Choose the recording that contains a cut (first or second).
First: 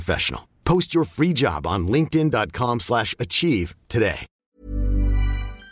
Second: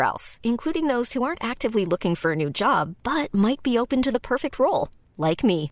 first